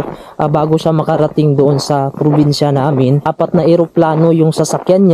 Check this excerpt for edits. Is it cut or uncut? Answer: cut